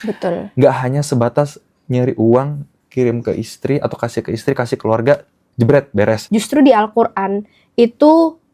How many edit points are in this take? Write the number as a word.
one